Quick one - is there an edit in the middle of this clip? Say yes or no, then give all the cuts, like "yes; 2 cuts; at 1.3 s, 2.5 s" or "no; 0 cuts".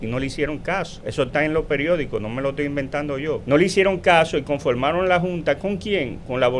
yes; 2 cuts; at 1.0 s, 3.4 s